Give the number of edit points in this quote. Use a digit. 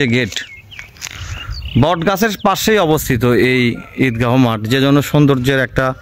0